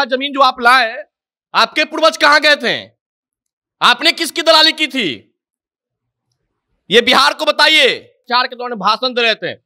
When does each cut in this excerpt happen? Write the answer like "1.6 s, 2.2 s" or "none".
8.3 s